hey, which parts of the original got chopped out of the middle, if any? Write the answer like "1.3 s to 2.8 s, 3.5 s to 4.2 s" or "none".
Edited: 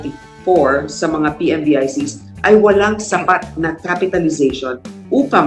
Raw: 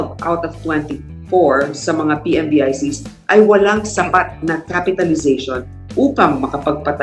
none